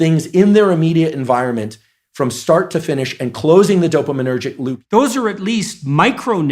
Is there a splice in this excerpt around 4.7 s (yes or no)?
yes